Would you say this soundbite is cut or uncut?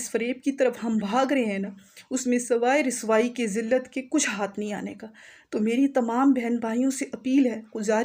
uncut